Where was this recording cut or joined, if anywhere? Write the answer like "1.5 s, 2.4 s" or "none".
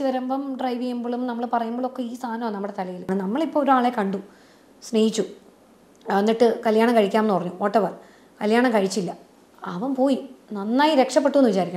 3.1 s